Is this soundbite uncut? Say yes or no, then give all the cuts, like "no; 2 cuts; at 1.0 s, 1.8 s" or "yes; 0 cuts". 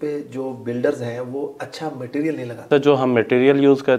no; 1 cut; at 2.7 s